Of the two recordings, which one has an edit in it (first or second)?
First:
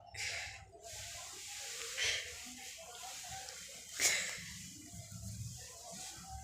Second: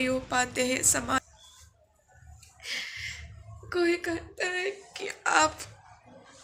second